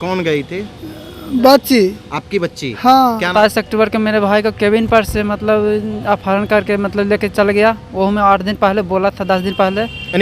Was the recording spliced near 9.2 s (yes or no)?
no